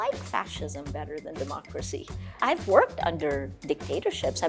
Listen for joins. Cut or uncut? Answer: cut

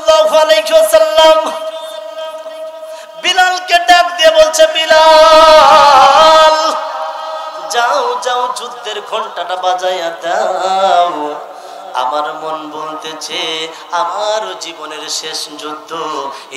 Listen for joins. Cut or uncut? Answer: uncut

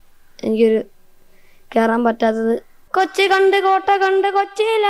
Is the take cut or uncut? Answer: cut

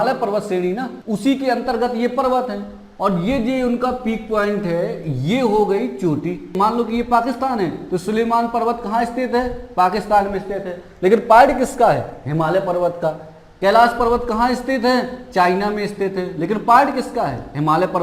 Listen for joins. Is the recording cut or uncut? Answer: cut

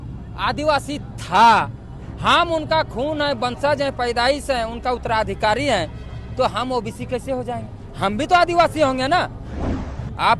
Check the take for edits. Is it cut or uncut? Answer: cut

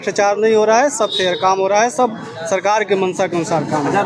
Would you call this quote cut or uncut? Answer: uncut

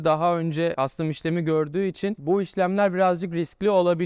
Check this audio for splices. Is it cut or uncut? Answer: uncut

